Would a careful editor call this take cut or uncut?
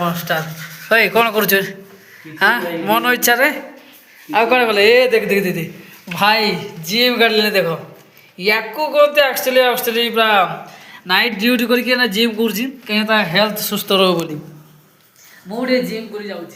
uncut